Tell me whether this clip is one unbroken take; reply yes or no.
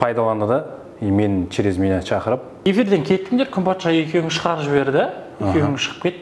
no